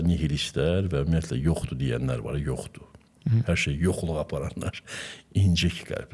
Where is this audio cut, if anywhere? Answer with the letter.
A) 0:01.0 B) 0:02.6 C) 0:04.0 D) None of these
D